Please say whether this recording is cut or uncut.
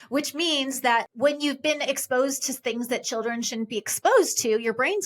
cut